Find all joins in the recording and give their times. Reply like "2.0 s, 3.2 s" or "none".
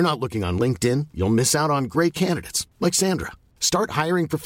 none